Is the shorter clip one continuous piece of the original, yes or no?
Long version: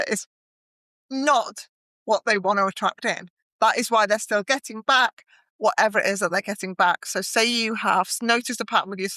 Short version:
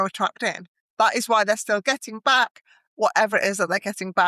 yes